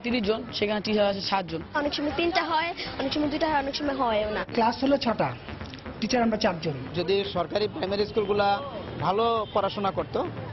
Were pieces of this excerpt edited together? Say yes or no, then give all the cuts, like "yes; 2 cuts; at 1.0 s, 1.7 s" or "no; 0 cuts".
yes; 2 cuts; at 1.7 s, 6.8 s